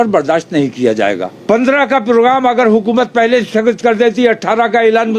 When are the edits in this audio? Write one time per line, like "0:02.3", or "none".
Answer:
0:01.3